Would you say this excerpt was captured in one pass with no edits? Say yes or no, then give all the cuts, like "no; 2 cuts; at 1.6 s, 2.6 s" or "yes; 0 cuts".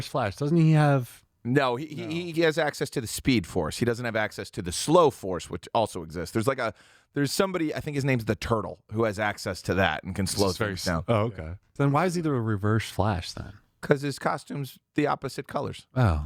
no; 1 cut; at 11.6 s